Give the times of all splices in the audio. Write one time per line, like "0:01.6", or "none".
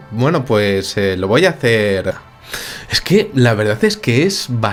none